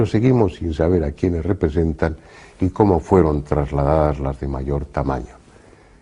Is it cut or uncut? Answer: cut